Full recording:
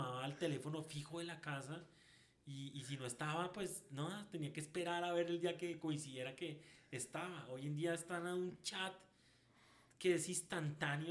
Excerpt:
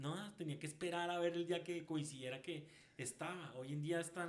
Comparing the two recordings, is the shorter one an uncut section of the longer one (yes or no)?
yes